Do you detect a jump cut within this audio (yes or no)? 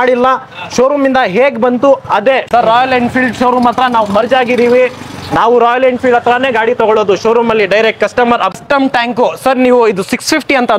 yes